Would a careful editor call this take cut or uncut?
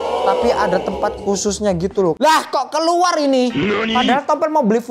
cut